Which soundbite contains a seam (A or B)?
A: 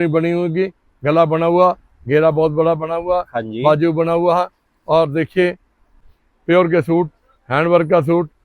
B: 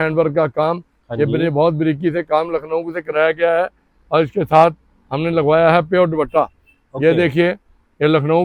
A